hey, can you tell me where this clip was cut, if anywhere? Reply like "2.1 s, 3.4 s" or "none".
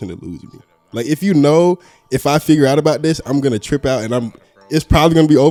none